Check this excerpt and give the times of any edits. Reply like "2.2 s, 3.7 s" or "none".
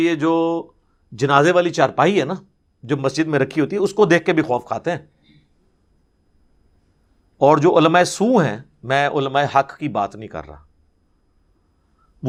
none